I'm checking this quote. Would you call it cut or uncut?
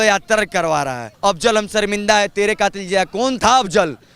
cut